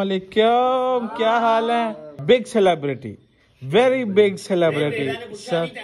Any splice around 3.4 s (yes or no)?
no